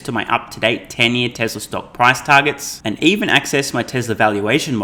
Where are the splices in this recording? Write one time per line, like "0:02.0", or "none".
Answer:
none